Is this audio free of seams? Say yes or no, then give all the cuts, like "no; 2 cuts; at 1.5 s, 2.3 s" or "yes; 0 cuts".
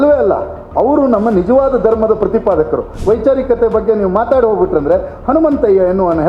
no; 1 cut; at 2.9 s